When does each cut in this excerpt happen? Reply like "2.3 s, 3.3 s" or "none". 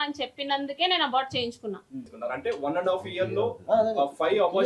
2.1 s